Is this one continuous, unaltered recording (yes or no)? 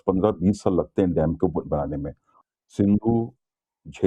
no